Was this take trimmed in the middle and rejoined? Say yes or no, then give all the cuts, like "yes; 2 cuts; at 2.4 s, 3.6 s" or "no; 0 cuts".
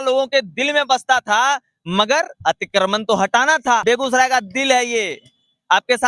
yes; 1 cut; at 3.8 s